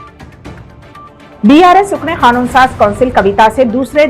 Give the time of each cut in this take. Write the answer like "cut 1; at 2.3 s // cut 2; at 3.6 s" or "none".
cut 1; at 1.4 s